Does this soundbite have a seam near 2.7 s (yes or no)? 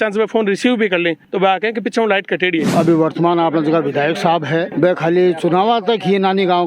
yes